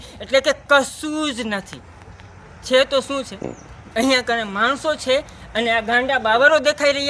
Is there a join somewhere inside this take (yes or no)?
no